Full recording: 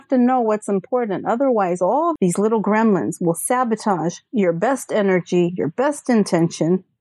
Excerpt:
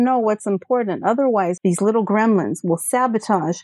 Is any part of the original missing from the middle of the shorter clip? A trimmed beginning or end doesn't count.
yes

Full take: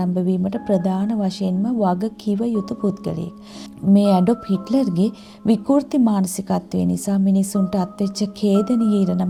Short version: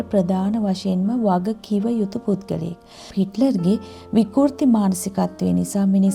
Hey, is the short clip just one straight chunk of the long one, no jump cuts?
no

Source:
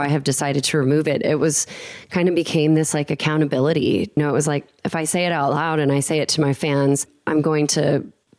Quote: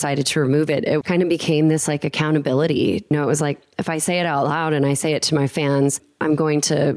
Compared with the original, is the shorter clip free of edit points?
no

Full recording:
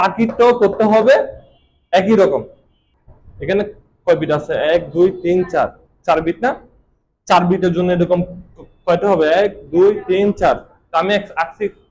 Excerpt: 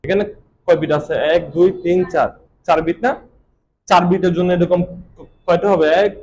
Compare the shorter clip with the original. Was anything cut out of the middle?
no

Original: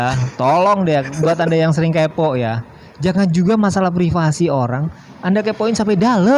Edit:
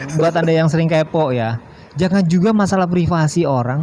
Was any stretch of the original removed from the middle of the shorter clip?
no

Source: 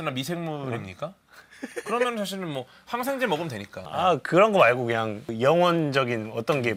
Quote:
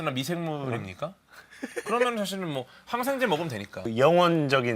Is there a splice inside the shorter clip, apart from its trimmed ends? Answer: yes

